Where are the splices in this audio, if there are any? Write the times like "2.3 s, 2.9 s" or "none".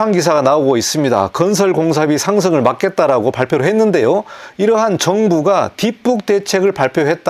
none